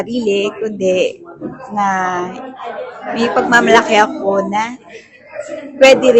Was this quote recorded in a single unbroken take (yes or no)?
yes